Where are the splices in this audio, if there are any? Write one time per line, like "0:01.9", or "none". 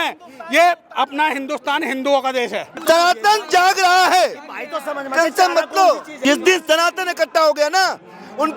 0:02.7
0:06.1